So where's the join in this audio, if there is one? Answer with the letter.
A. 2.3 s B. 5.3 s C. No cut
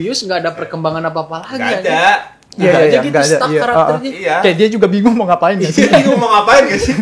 C